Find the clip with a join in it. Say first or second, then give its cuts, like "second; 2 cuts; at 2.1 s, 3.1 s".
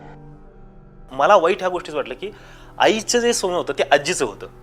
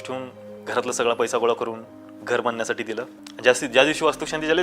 second; 1 cut; at 3.2 s